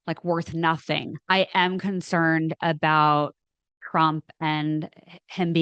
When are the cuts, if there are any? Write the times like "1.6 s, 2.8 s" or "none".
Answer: 1.1 s